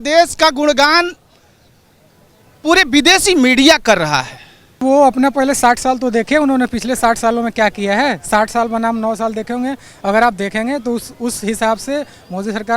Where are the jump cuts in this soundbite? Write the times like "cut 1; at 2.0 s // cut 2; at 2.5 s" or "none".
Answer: cut 1; at 4.8 s